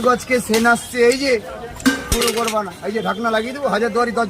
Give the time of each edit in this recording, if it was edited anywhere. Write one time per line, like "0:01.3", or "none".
0:02.2